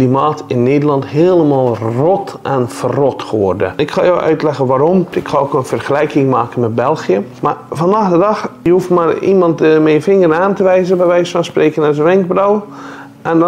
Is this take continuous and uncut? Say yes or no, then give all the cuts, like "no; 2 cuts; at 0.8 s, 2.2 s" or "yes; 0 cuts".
no; 4 cuts; at 3.7 s, 5.2 s, 7.3 s, 8.5 s